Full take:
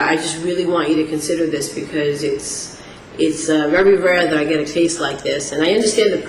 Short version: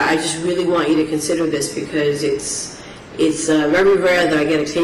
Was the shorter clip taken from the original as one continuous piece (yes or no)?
yes